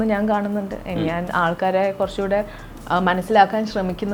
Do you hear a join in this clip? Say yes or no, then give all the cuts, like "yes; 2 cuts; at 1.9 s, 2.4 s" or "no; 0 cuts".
no; 0 cuts